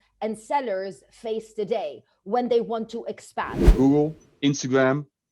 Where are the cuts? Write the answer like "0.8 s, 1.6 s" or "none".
3.6 s